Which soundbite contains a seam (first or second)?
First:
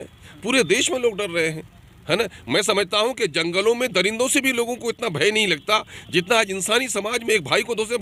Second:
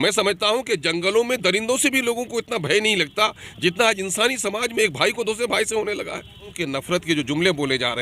second